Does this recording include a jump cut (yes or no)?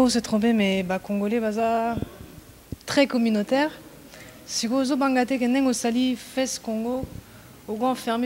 no